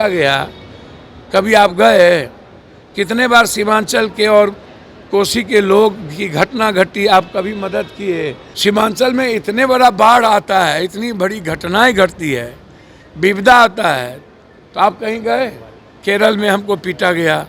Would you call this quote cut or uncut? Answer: cut